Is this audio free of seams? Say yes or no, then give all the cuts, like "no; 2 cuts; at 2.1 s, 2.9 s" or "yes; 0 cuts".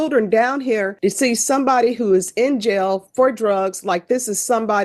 no; 1 cut; at 0.9 s